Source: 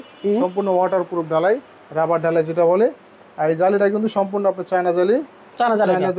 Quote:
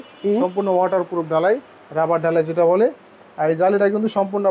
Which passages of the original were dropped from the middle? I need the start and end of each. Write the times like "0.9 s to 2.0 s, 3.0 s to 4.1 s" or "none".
none